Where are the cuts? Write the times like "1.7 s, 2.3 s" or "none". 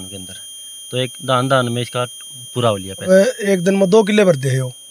3.1 s